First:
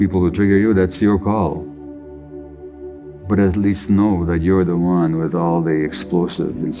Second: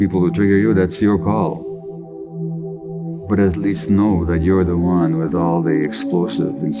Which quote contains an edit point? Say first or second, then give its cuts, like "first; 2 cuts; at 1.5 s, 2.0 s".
second; 2 cuts; at 1.6 s, 3.2 s